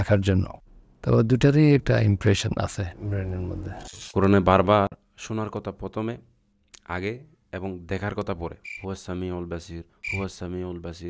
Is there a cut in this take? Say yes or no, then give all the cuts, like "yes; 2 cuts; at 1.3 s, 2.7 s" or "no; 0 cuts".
yes; 2 cuts; at 4.0 s, 8.7 s